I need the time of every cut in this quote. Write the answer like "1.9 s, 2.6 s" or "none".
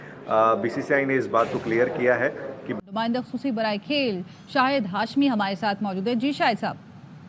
none